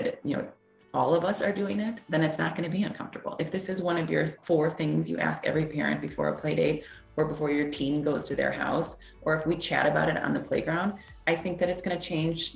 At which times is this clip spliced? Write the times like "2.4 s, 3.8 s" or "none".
4.4 s

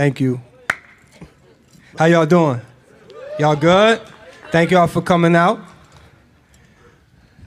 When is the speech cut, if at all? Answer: 1.8 s

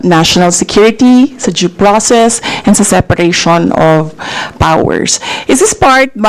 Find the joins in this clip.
none

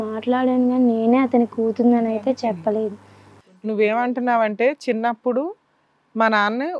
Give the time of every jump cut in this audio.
none

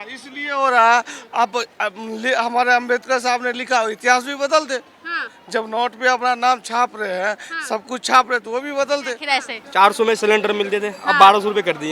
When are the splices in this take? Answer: 9.6 s

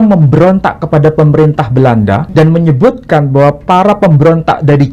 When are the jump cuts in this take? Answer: 2.3 s

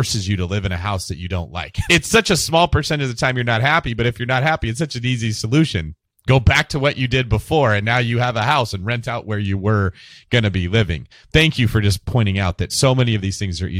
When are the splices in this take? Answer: 1.7 s, 11.1 s, 12.7 s

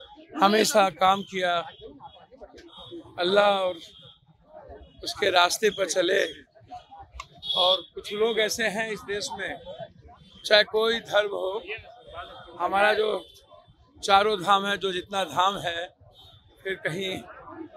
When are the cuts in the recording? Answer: none

